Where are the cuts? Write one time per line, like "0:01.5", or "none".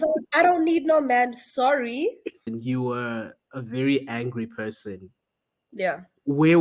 0:02.5